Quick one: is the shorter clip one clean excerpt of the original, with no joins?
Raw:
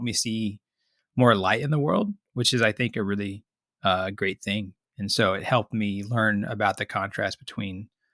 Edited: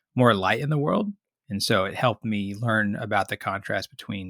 no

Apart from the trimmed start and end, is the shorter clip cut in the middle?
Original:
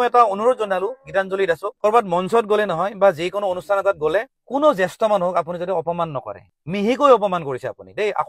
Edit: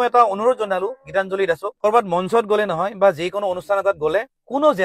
no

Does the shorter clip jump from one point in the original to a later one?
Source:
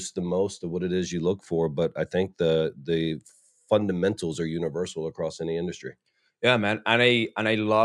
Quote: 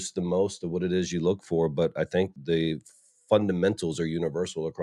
yes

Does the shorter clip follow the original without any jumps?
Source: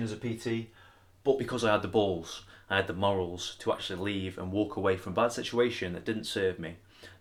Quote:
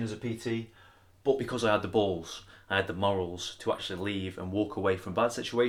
yes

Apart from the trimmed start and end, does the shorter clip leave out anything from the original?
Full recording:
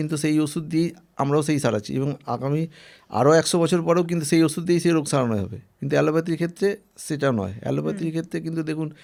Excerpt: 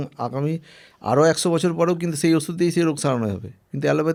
no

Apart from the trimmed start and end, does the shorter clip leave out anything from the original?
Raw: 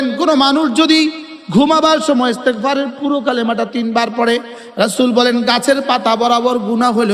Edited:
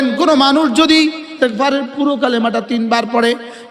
yes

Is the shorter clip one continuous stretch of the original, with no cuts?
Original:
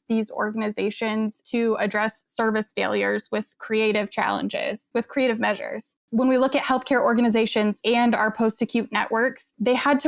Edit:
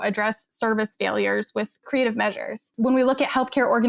no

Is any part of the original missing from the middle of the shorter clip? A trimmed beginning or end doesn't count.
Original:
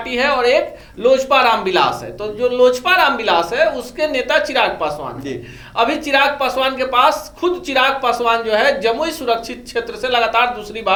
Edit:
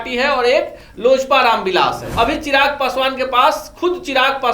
yes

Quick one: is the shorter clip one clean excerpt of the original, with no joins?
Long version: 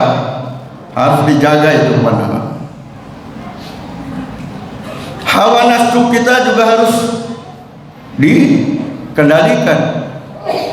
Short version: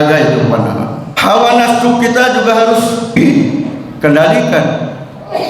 no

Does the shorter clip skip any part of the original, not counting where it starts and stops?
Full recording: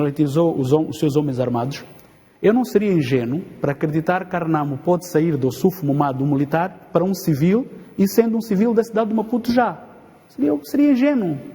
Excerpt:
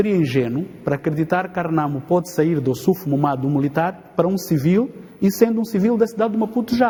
no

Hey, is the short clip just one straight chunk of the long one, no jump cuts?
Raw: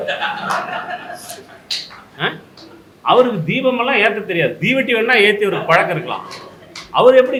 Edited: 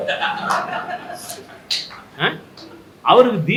yes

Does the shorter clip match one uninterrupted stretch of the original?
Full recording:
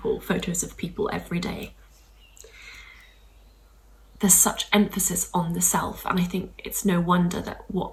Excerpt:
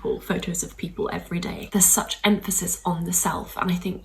no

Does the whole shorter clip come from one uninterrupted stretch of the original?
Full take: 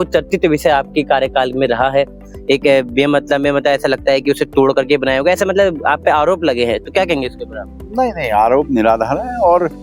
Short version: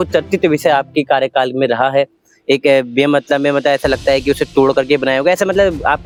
yes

